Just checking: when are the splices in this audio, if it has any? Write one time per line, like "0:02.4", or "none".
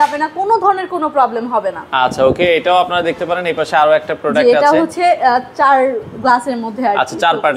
none

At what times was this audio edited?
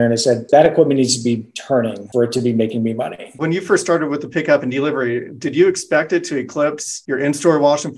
0:03.2

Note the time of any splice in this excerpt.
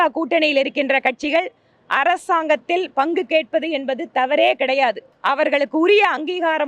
0:05.1

